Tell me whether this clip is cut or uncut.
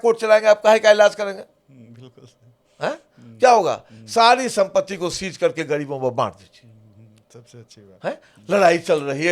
uncut